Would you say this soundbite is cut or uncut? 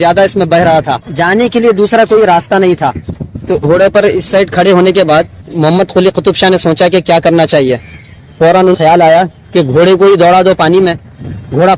cut